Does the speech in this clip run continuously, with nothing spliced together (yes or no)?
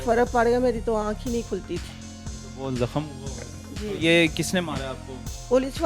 yes